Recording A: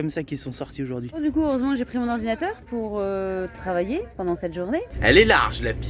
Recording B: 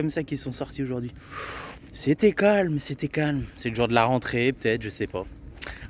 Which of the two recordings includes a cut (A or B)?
A